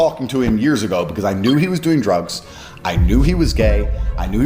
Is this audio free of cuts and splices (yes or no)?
yes